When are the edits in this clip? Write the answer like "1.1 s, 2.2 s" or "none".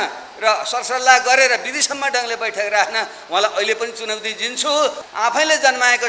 5.0 s